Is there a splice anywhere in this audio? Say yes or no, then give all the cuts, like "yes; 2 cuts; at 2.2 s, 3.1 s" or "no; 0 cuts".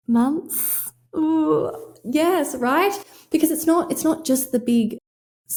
no; 0 cuts